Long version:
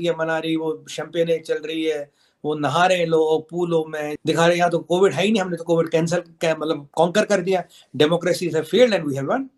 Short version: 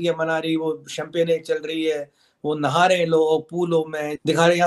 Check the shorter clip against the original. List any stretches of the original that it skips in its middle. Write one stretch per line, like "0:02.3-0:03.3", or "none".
none

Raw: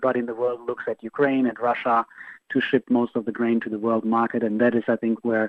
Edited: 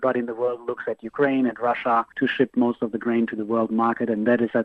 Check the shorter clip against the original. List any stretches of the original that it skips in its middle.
0:02.1-0:02.4

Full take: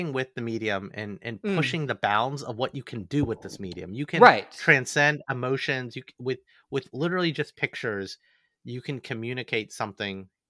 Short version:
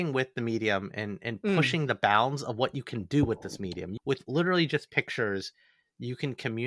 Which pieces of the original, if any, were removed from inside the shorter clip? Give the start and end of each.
0:03.9-0:06.5

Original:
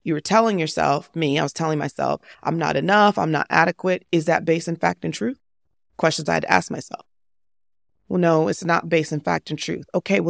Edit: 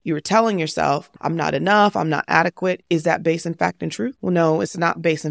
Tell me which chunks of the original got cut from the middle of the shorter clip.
0:01.1-0:02.3
0:05.4-0:08.0

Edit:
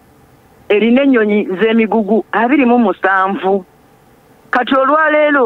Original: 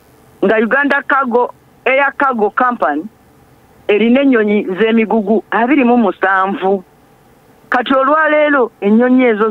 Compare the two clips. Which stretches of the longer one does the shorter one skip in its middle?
none

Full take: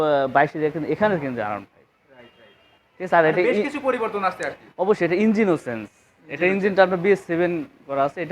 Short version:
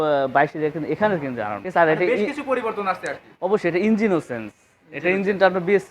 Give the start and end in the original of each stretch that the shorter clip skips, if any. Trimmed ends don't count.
0:01.6-0:03.0

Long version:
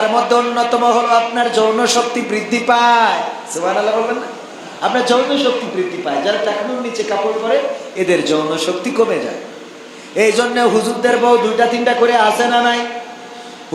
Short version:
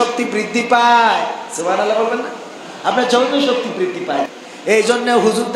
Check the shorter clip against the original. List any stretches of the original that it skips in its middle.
0:06.2-0:09.7

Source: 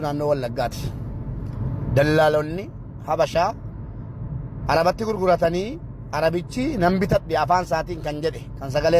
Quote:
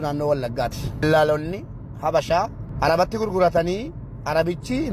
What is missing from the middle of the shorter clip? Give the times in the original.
0:01.0-0:02.1
0:03.7-0:04.5

